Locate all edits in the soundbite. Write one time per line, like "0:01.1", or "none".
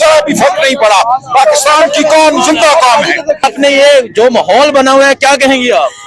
0:03.4